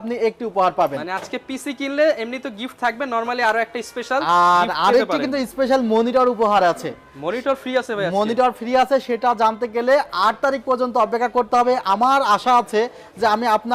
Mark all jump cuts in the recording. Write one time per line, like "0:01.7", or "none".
none